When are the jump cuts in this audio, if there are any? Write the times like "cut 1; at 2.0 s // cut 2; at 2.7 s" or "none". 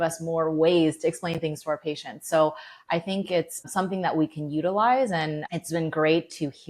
cut 1; at 3.7 s // cut 2; at 5.4 s